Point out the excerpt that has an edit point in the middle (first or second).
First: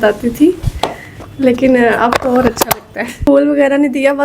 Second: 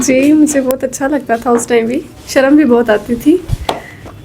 first